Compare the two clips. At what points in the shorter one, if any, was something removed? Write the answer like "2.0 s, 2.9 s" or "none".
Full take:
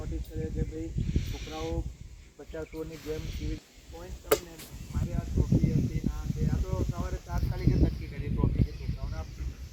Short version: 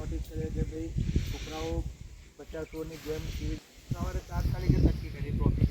3.9 s